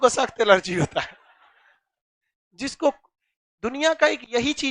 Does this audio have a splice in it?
no; 0 cuts

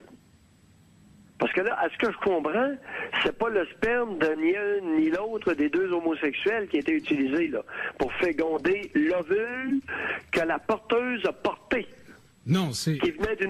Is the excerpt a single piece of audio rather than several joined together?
no; 1 cut; at 5.2 s

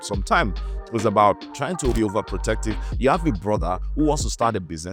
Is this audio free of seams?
no; 1 cut; at 1.9 s

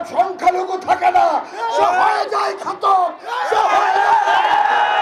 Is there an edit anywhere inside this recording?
no; 0 cuts

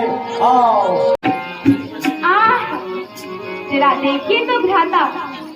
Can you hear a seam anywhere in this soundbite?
yes; 1 cut; at 1.2 s

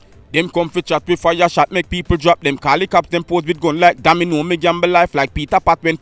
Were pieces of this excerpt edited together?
no; 0 cuts

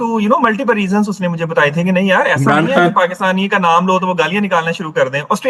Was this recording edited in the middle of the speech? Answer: no; 0 cuts

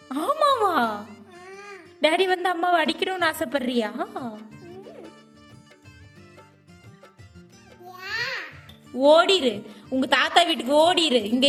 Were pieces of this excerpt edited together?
no; 0 cuts

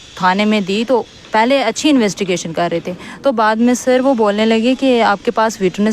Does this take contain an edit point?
no; 0 cuts

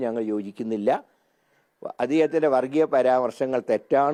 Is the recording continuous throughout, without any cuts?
yes; 0 cuts

